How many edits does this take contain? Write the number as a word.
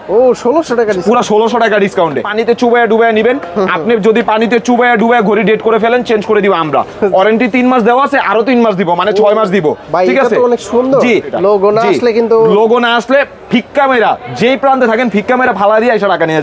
two